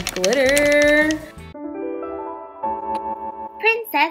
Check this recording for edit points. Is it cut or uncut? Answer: cut